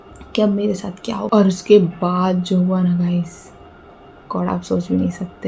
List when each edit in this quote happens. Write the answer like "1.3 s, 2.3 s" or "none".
1.3 s